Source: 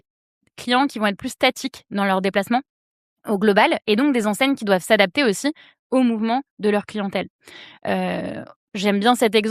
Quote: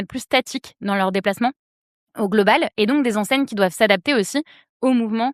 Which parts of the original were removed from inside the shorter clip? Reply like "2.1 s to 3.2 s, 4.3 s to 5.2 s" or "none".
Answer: none